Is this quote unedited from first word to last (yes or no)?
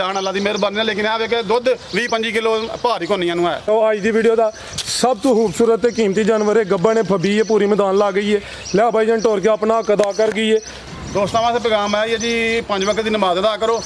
no